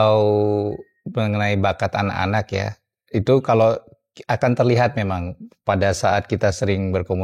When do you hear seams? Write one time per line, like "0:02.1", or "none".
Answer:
none